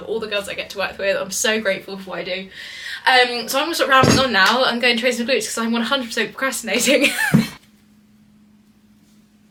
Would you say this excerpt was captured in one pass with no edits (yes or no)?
yes